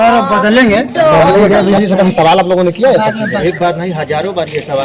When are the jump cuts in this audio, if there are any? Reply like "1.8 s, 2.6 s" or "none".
1.7 s